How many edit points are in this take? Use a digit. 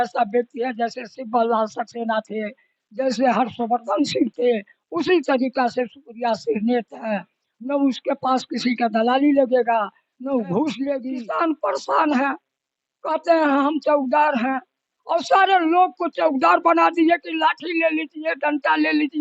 1